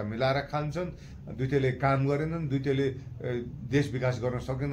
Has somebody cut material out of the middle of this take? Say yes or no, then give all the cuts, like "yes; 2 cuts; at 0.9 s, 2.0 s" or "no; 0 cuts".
no; 0 cuts